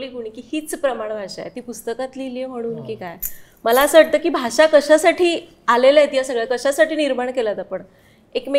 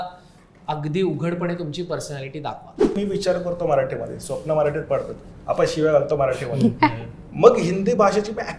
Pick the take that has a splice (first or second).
second